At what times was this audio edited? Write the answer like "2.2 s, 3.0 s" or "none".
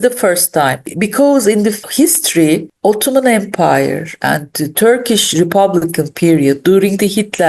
0.9 s, 1.8 s, 2.7 s